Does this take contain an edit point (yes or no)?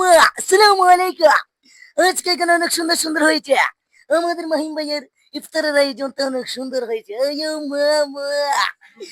no